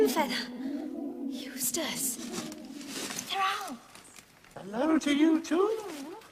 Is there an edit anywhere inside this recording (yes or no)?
no